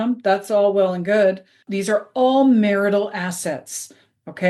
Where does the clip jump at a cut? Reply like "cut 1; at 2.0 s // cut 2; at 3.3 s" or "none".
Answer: cut 1; at 1.6 s